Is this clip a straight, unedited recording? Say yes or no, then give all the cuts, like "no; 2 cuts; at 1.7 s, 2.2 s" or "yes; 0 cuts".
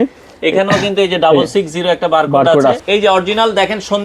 no; 1 cut; at 2.8 s